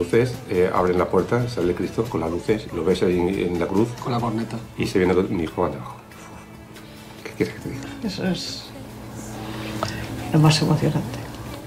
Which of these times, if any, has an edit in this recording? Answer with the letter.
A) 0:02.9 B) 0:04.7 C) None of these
C